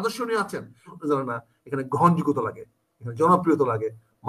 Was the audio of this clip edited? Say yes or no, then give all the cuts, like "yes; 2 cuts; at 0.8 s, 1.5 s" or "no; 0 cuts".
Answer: yes; 1 cut; at 0.9 s